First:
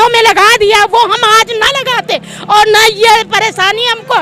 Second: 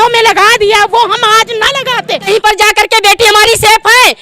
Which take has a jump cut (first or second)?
second